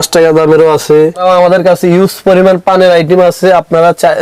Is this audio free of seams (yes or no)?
no